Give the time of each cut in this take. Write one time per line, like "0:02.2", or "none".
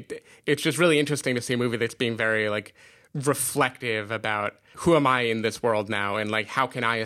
0:04.7

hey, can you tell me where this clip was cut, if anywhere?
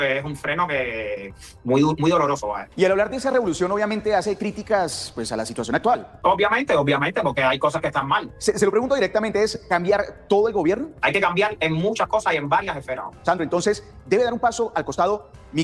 0:02.6
0:06.1
0:08.3
0:10.9
0:13.1

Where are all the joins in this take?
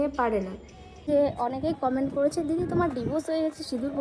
0:01.0

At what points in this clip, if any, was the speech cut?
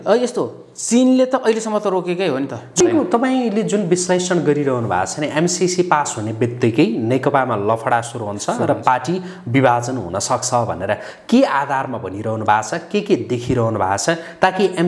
0:02.8

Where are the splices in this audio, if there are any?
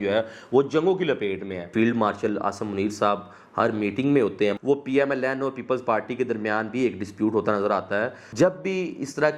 0:01.7
0:04.6
0:08.2

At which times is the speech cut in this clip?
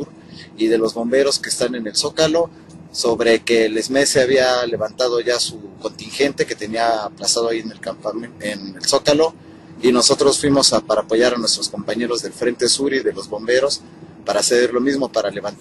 none

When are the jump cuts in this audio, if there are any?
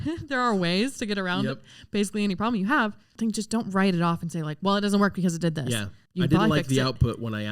0:06.0

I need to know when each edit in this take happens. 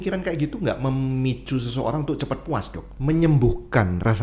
0:02.9

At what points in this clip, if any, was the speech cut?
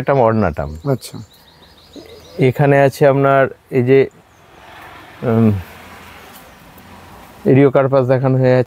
none

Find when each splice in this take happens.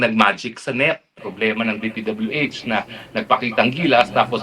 0:01.2

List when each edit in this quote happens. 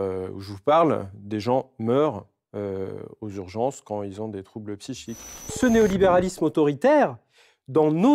0:05.4

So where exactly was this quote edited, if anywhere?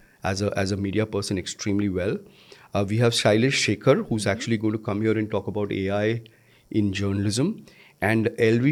none

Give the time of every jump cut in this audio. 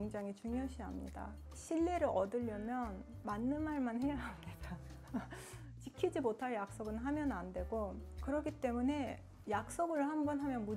0:01.3
0:08.1

